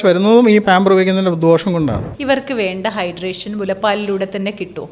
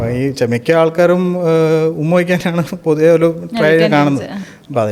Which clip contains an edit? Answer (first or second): first